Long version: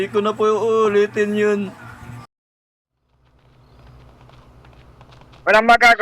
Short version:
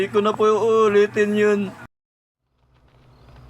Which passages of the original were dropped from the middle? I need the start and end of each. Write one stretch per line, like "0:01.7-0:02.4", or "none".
0:01.9-0:02.4

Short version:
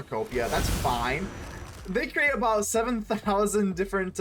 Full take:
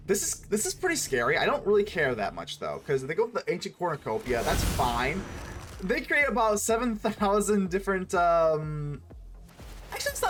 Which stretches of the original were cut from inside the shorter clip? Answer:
none

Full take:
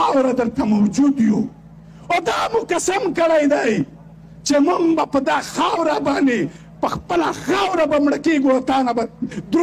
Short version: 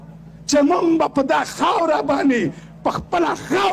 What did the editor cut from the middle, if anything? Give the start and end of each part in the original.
none

